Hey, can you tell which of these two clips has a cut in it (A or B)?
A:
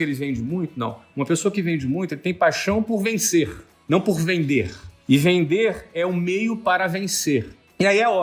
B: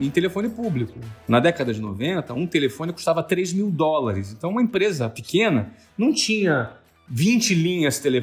B